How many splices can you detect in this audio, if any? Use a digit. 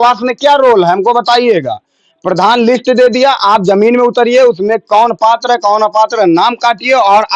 0